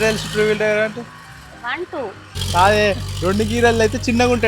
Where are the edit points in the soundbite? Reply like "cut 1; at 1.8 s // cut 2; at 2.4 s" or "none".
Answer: cut 1; at 2.3 s